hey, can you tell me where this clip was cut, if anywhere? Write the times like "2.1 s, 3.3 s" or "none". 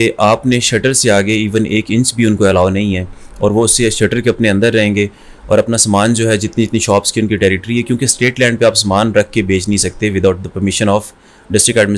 none